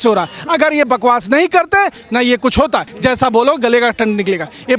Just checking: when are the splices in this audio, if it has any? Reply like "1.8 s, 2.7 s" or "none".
2.9 s